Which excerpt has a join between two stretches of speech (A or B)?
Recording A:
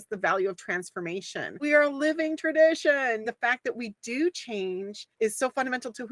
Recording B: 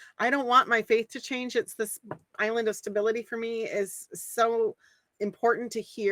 A